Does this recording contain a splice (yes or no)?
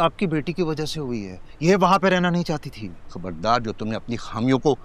no